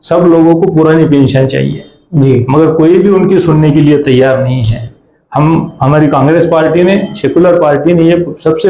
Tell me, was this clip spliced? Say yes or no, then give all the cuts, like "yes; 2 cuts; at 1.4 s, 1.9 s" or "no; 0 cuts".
no; 0 cuts